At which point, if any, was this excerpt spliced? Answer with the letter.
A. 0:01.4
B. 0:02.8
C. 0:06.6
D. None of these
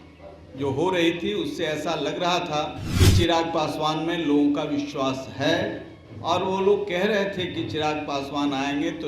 B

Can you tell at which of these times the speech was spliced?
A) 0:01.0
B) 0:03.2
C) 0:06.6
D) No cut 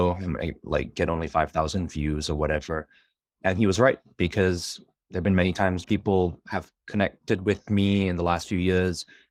D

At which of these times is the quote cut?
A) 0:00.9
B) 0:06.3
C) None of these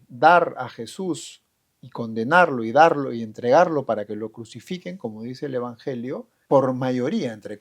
B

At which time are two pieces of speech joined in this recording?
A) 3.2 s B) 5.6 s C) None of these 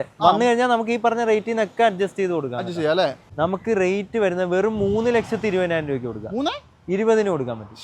A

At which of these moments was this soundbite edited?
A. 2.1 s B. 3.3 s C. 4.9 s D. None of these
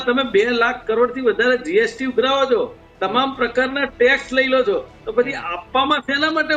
D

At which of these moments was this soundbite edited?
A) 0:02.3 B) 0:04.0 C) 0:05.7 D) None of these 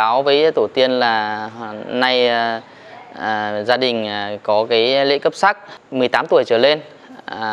C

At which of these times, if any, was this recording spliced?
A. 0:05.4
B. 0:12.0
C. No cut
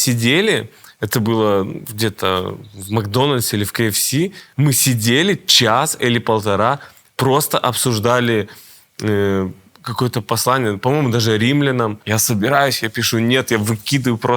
B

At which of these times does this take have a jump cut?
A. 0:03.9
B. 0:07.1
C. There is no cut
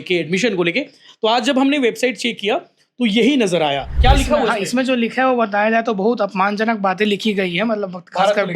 A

